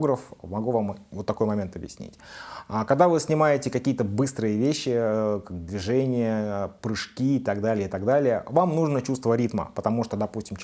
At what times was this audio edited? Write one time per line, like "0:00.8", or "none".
none